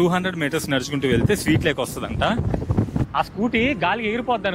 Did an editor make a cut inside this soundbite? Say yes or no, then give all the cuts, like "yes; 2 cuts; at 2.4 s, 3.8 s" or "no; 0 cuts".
yes; 1 cut; at 3.2 s